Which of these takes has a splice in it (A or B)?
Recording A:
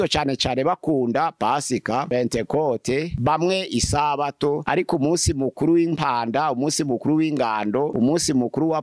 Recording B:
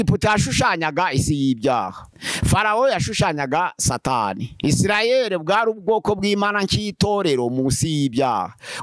A